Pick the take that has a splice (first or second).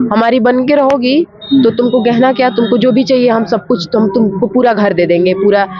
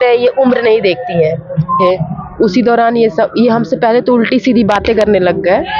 second